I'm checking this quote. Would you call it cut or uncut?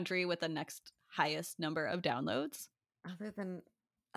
uncut